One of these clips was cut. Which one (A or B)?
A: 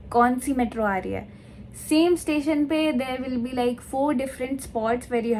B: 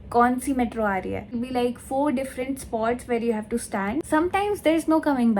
B